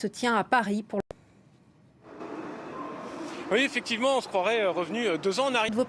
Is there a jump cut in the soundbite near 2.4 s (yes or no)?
no